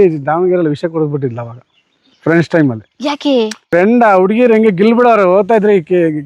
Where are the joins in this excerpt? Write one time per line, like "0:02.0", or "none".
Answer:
0:03.6